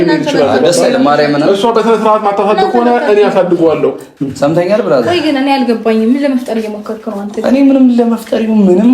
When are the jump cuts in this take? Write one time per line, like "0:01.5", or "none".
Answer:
0:04.1

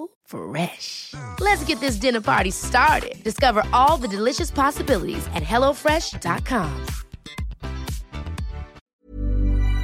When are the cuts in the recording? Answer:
0:08.8

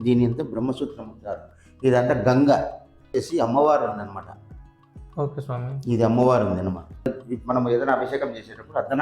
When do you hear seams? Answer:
0:03.1
0:07.2

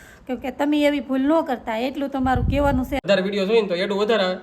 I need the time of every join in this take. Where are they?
0:03.0

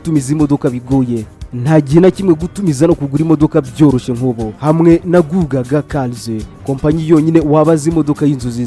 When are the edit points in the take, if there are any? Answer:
none

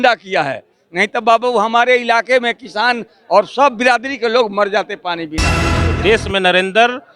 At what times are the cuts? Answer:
0:05.7

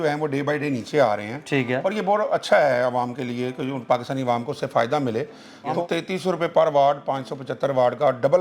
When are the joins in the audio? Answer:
0:05.8

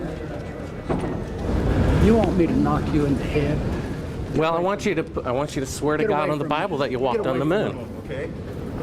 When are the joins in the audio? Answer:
0:01.4

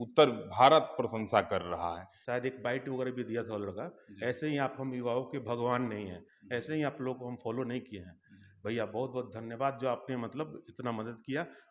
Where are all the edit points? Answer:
0:02.1

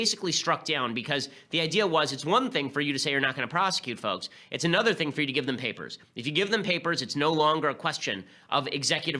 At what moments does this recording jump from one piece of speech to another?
0:02.2

